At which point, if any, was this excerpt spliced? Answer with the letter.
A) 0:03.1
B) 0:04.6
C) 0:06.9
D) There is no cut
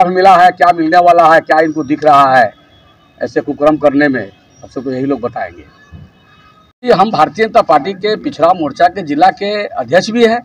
C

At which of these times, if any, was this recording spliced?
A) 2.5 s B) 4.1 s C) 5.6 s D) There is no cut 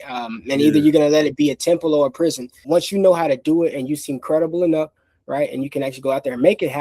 A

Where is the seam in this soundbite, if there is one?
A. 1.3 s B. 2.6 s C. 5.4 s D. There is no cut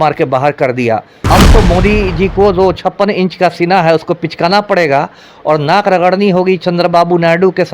A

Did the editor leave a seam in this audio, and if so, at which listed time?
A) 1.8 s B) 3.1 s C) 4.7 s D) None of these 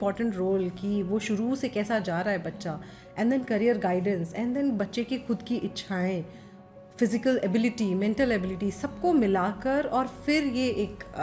D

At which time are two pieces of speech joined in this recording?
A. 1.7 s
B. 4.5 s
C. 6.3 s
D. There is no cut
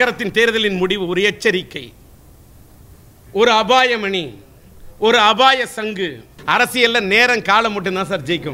C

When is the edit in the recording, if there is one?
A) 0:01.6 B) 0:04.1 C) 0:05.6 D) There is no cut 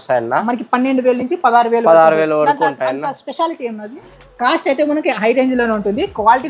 B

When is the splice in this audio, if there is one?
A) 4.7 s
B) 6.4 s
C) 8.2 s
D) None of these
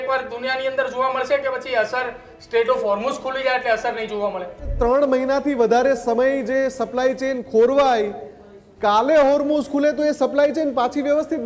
A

